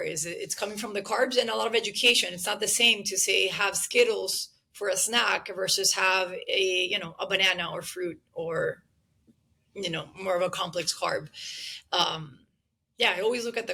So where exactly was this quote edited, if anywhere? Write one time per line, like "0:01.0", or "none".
none

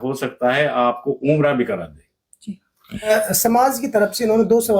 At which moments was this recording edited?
0:03.3

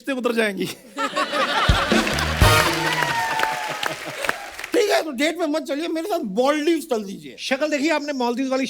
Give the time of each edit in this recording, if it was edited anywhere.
0:04.5

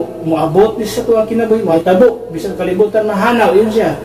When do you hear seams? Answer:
0:01.7

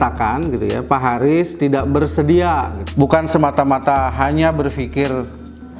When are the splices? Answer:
0:02.8

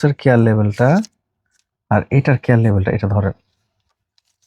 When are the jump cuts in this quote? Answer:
none

